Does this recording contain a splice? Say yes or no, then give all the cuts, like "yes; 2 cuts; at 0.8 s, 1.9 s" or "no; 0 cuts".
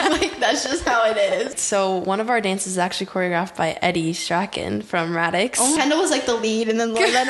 yes; 2 cuts; at 1.6 s, 5.7 s